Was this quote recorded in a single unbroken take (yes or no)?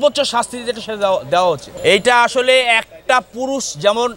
no